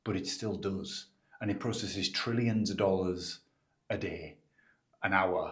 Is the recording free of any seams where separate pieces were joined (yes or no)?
yes